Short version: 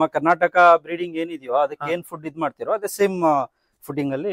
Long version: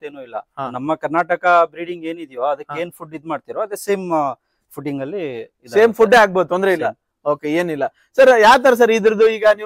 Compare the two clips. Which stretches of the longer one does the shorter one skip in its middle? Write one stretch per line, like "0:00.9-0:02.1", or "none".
none

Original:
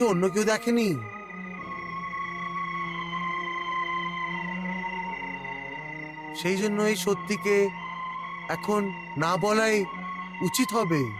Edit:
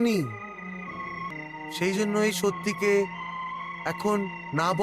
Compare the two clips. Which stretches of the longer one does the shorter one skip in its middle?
0:02.0-0:05.9

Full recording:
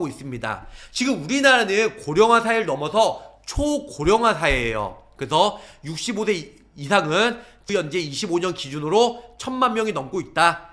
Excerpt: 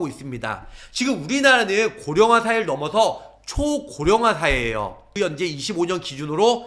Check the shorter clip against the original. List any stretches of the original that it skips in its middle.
0:05.0-0:07.5

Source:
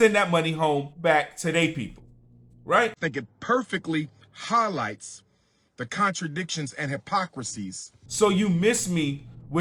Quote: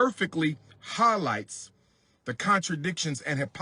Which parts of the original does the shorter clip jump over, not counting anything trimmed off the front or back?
none

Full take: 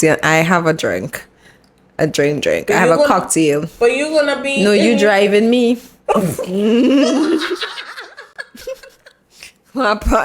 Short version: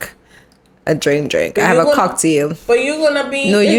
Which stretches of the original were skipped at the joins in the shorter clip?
none

